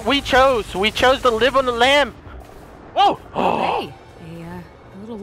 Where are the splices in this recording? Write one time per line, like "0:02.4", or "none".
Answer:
0:02.8